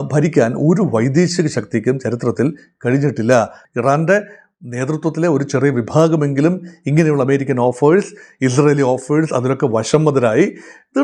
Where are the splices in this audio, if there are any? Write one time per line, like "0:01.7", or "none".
0:03.6